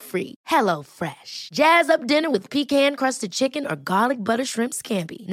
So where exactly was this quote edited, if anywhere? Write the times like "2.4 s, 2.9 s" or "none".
none